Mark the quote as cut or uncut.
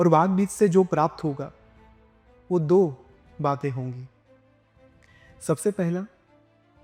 uncut